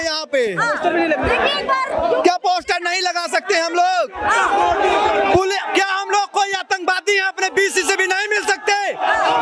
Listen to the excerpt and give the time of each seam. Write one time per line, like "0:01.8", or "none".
none